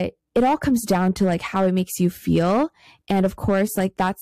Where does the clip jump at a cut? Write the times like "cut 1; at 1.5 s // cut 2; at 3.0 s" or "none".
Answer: none